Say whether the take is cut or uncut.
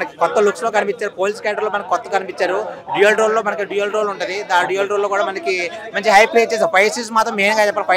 uncut